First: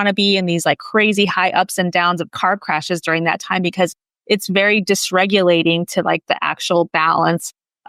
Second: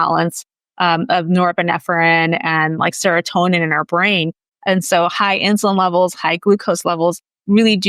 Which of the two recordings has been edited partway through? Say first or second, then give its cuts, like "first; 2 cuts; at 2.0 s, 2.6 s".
second; 1 cut; at 4.5 s